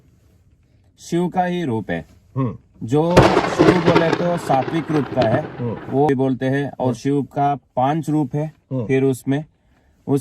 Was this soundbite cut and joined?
yes; 1 cut; at 6.1 s

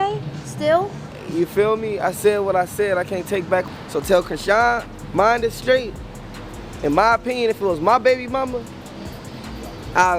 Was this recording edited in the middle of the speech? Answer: yes; 1 cut; at 3.7 s

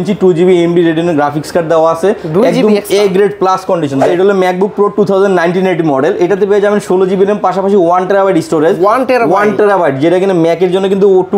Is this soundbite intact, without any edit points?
no; 1 cut; at 4.1 s

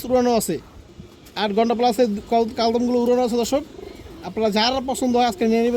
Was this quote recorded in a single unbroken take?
yes; 0 cuts

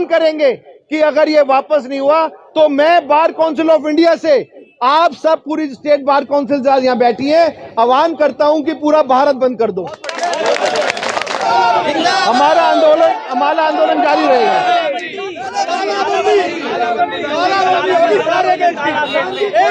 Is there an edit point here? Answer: yes; 1 cut; at 11.4 s

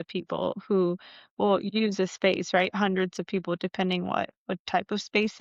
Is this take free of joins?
yes; 0 cuts

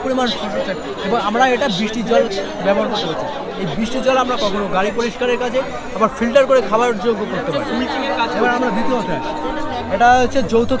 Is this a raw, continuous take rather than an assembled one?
yes; 0 cuts

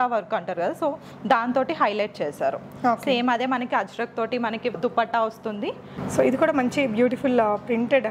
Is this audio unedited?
no; 2 cuts; at 4.8 s, 5.9 s

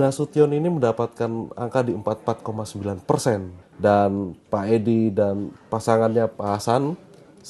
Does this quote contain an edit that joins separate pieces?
yes; 1 cut; at 3.5 s

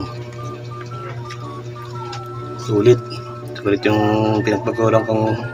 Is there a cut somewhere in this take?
no; 0 cuts

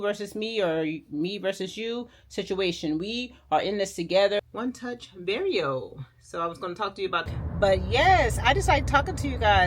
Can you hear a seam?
yes; 2 cuts; at 4.4 s, 7.3 s

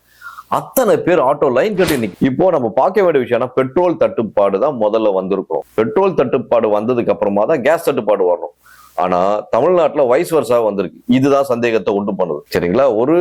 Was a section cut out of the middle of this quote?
yes; 2 cuts; at 2.1 s, 5.6 s

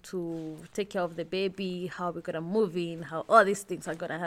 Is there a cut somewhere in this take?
no; 0 cuts

